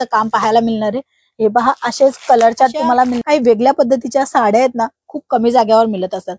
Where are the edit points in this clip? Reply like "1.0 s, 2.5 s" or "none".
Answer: 3.2 s